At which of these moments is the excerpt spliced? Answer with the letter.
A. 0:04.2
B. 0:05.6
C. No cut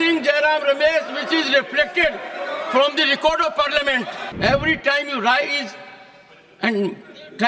A